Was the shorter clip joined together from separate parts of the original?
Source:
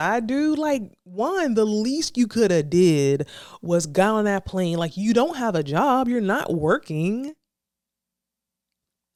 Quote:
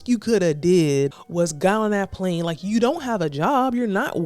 yes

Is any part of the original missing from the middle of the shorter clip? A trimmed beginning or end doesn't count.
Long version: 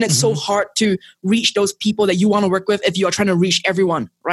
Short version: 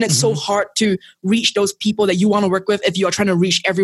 no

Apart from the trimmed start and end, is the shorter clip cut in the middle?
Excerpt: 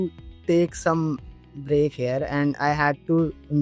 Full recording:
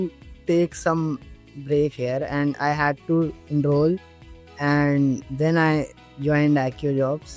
no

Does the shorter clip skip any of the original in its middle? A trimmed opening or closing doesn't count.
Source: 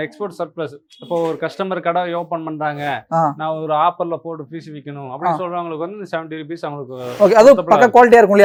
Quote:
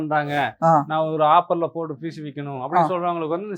no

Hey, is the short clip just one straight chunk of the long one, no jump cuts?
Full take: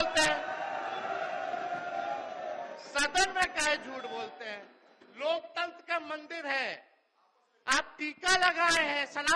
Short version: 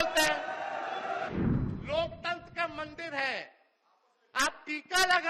no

